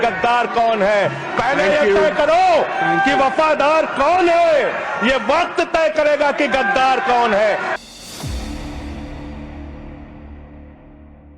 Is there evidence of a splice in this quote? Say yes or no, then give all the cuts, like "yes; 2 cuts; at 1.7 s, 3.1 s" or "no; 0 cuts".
no; 0 cuts